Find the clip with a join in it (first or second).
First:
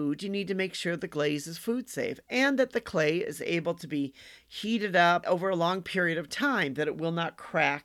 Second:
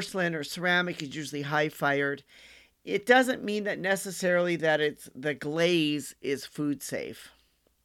first